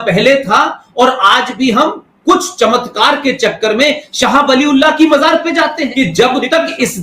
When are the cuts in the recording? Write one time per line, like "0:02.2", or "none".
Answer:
0:05.8

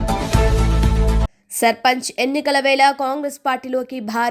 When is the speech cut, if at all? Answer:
0:01.4

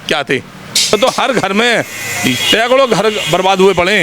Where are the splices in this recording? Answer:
0:00.9

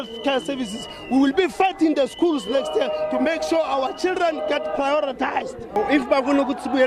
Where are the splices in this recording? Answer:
0:05.8

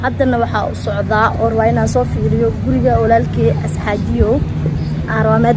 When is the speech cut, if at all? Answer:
none

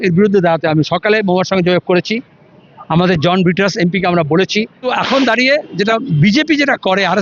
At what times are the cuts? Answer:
0:04.9

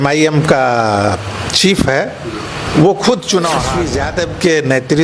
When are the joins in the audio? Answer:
0:03.8

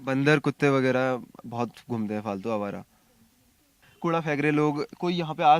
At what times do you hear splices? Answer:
0:03.8

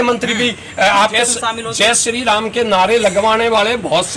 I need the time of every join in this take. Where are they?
0:01.1

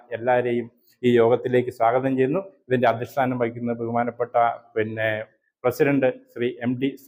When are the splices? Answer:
none

